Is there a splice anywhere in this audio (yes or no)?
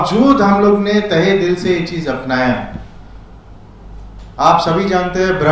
no